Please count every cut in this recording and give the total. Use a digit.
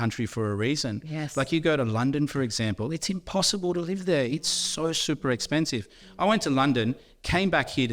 0